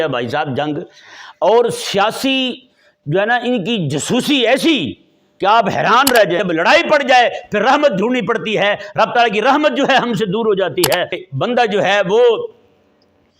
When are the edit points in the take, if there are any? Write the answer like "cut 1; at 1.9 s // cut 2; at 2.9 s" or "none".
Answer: cut 1; at 6.4 s // cut 2; at 11.2 s